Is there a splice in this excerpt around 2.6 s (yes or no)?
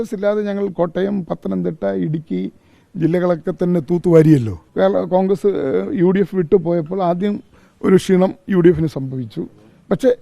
no